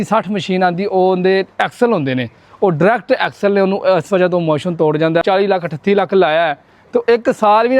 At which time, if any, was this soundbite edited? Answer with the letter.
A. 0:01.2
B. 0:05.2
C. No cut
B